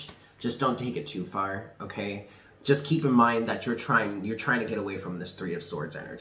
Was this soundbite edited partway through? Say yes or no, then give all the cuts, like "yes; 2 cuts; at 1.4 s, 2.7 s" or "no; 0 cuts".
no; 0 cuts